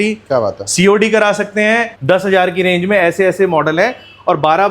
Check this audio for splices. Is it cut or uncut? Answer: cut